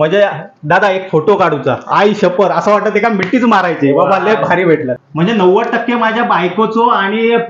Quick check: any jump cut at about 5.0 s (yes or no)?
yes